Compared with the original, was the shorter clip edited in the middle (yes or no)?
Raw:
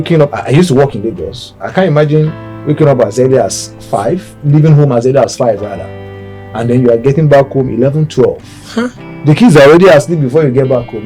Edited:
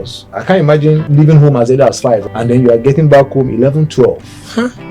yes